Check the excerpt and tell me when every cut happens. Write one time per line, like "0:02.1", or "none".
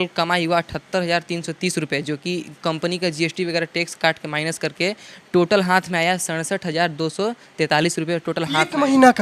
none